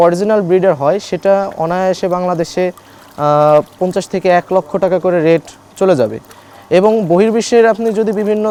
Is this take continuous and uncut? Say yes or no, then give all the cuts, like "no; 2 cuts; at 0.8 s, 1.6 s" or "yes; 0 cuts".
yes; 0 cuts